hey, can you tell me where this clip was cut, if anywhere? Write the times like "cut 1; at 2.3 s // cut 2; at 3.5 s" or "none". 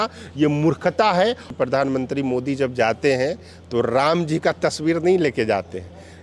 cut 1; at 1.5 s